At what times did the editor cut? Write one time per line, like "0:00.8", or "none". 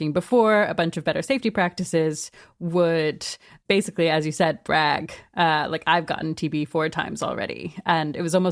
none

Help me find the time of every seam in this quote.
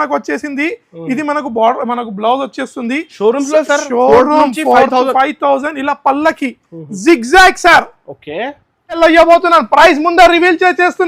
0:09.0

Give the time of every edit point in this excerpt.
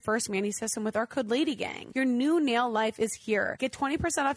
0:01.8
0:03.5

